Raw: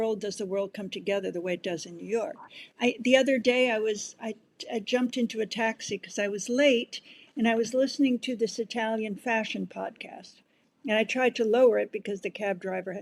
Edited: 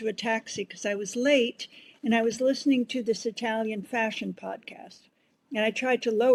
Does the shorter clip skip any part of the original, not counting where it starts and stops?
no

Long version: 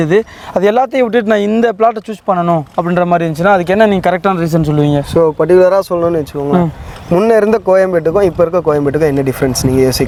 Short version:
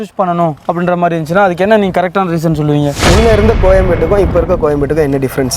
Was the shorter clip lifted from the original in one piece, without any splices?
no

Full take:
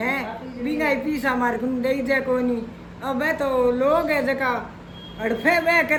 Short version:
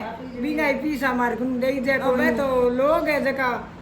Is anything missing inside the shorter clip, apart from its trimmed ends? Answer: yes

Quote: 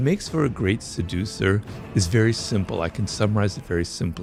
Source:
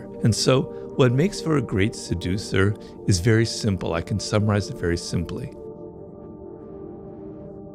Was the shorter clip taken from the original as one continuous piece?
yes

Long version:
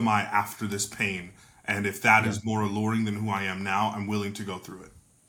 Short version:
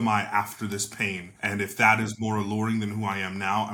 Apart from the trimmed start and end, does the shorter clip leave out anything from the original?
yes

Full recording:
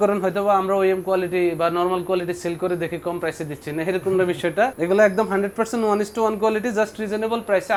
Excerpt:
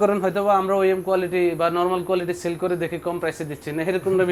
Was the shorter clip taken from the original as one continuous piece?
yes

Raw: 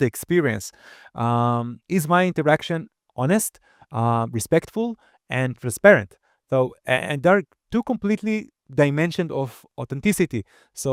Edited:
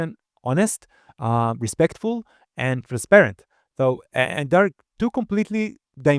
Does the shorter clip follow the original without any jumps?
yes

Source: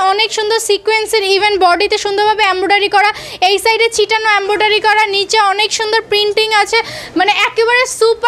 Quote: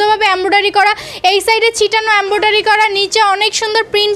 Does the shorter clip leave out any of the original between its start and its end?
no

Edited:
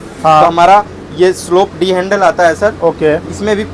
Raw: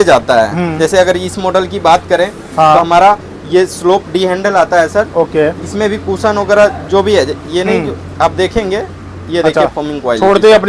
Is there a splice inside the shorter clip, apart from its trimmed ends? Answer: no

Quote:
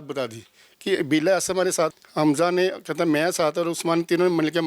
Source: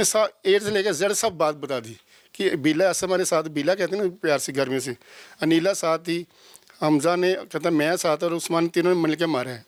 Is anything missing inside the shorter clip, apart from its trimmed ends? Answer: yes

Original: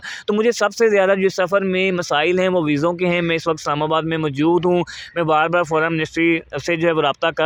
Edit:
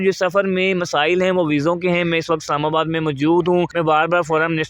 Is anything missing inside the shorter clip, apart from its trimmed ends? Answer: yes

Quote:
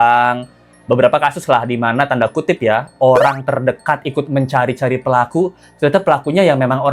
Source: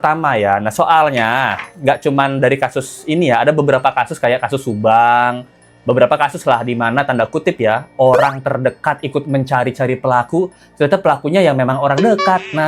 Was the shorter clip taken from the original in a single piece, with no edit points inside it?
yes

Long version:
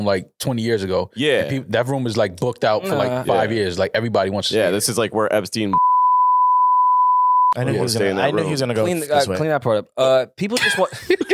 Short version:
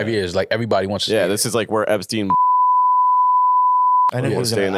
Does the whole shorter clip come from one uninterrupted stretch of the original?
yes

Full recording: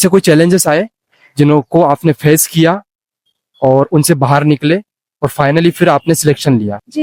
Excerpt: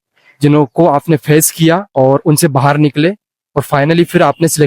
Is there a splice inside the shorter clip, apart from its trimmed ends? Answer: yes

